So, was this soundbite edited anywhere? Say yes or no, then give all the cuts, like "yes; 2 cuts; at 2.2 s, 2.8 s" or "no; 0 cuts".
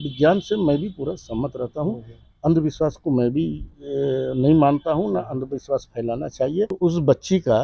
yes; 1 cut; at 6.7 s